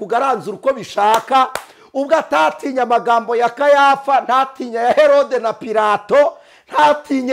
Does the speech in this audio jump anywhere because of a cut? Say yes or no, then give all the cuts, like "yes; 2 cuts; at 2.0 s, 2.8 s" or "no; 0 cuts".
no; 0 cuts